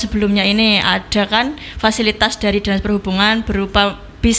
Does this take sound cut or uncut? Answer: uncut